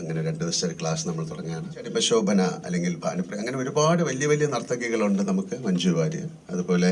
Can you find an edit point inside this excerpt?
yes; 1 cut; at 1.9 s

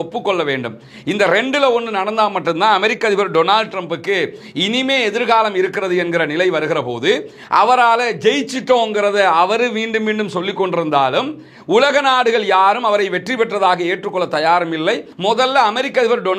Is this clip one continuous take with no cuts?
no; 1 cut; at 15.1 s

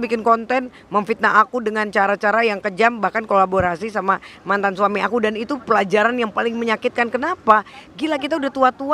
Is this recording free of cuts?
yes; 0 cuts

